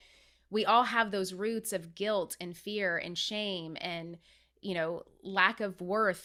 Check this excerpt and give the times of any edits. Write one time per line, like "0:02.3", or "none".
none